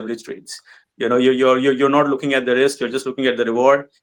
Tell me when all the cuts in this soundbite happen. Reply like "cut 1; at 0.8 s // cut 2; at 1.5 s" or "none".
none